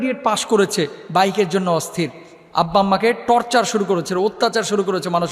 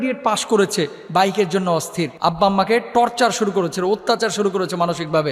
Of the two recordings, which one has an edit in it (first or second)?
second